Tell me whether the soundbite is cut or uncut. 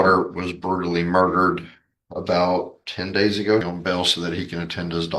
cut